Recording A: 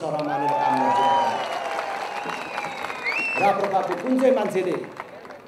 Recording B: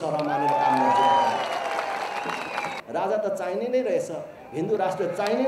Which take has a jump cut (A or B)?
B